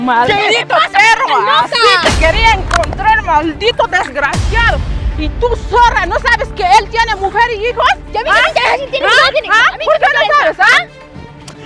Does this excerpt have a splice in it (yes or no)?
no